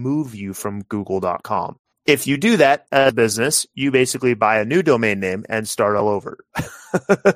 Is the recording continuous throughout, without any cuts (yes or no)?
no